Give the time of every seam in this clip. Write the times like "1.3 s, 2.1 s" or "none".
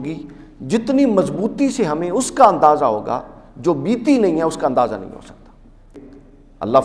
6.0 s